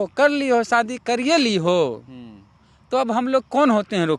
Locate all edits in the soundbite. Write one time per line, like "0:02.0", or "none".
none